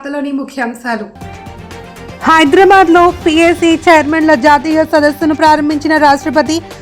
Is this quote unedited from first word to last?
no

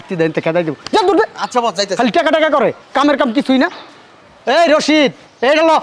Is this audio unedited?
yes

